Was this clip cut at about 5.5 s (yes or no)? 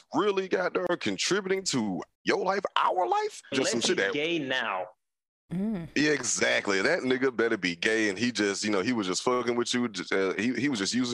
no